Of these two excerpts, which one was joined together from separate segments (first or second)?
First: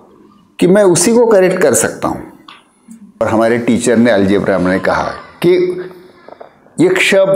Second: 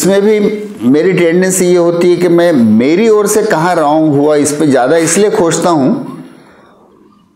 first